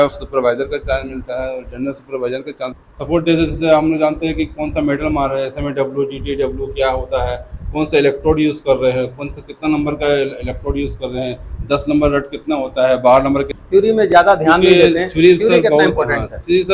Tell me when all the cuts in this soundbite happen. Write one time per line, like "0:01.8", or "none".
0:02.8
0:13.5